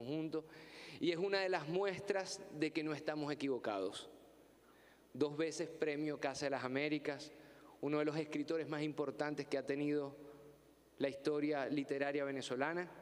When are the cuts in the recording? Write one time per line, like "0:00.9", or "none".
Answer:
0:10.2